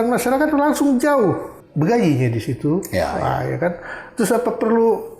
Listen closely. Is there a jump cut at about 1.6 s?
yes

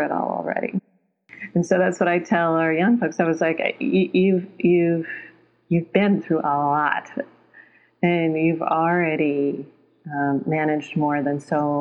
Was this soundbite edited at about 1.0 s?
yes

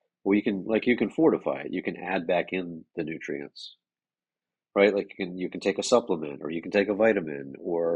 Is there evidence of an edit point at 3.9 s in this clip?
no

